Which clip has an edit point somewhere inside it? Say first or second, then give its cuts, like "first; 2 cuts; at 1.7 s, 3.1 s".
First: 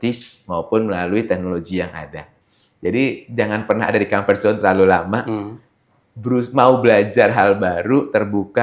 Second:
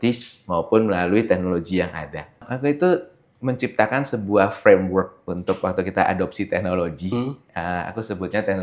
first; 1 cut; at 2.4 s